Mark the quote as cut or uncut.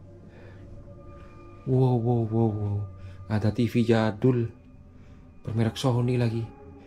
uncut